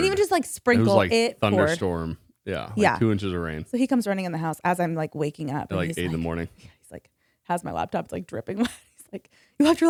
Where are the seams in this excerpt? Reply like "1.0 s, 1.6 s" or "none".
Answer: none